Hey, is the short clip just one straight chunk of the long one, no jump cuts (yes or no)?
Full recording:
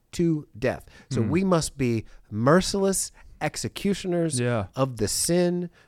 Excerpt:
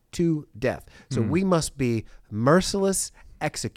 yes